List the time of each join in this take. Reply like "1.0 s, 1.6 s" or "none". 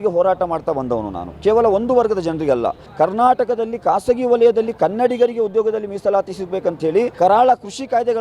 2.8 s, 7.1 s